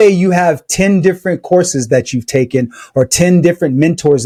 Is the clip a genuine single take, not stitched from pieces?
yes; 0 cuts

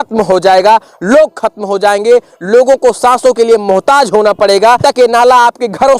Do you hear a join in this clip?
yes; 1 cut; at 4.8 s

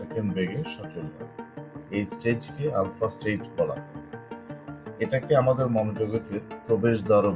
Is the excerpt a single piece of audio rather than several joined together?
yes; 0 cuts

